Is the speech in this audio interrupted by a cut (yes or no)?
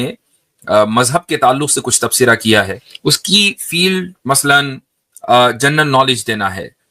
yes